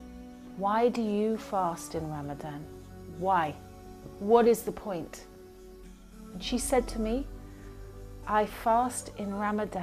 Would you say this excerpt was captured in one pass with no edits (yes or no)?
yes